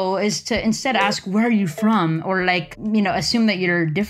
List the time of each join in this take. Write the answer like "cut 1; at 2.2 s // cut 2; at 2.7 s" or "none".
cut 1; at 2.7 s